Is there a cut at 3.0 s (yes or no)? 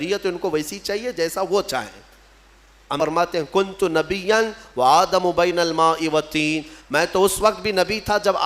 yes